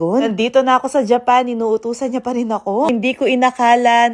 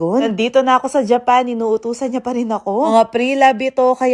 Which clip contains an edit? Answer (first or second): first